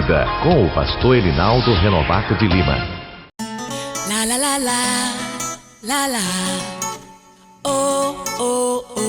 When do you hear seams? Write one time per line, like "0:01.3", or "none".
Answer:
0:03.2